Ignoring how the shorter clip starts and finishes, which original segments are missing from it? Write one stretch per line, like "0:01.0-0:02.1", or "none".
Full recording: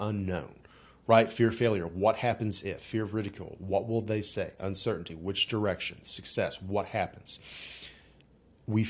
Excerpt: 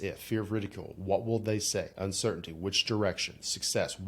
none